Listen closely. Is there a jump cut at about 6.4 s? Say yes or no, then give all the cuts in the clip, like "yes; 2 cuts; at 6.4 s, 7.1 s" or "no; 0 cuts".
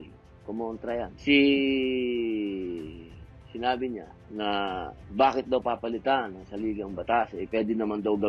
no; 2 cuts; at 1.2 s, 4.2 s